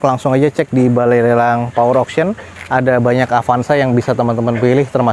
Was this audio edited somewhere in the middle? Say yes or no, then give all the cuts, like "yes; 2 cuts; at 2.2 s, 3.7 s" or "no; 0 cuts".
no; 0 cuts